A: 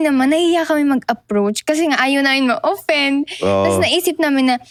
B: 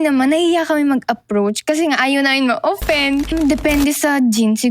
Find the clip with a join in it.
B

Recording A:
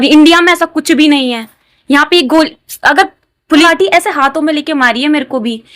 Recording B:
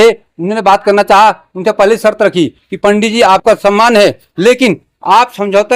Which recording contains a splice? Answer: A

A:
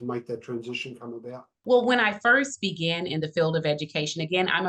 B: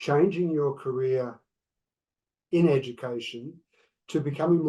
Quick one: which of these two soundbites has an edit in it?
A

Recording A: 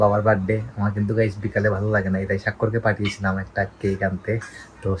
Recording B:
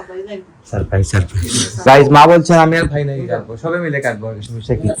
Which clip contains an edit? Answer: B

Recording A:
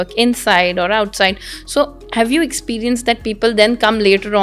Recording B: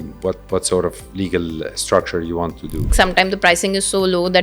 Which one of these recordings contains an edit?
B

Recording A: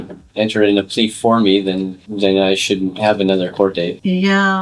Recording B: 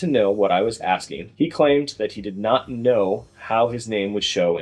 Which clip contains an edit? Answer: B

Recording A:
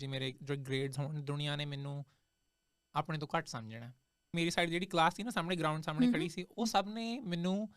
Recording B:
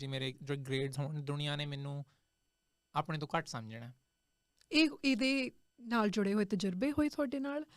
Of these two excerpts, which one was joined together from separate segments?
A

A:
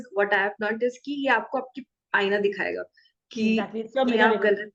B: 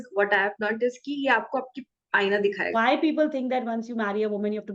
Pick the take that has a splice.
B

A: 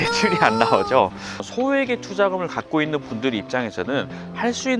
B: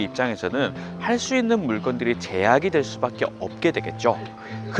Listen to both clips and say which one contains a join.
A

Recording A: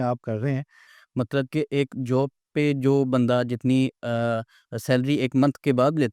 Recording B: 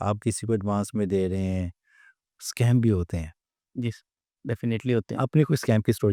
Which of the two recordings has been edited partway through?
A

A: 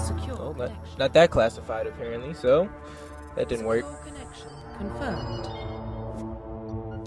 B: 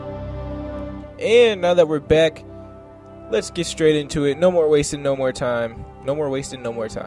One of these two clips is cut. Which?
B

